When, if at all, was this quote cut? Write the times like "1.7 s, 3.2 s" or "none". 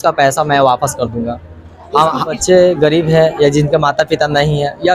2.4 s

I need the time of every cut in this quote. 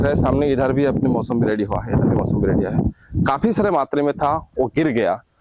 none

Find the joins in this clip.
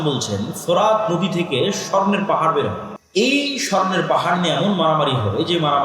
2.9 s

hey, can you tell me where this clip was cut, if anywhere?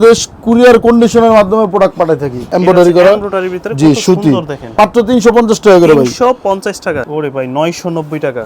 2.5 s, 4.8 s, 6.9 s

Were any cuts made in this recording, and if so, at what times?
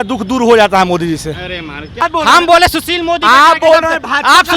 2.0 s

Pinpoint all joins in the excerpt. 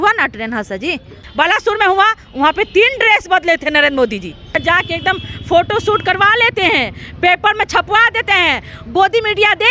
1.2 s, 4.6 s

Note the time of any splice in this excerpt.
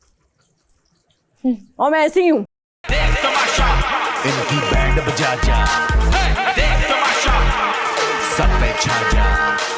2.8 s

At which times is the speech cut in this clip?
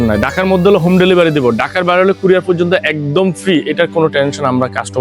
none

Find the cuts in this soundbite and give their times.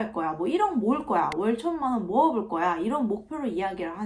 none

